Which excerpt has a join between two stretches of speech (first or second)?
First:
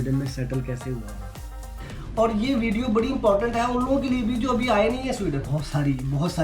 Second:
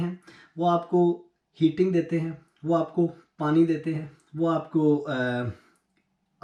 first